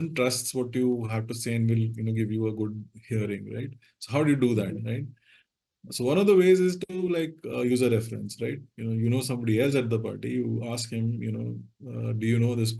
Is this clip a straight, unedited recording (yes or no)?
yes